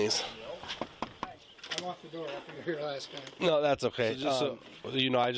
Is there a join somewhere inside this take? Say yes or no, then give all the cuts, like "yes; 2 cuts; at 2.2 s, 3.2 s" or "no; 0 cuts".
yes; 1 cut; at 0.9 s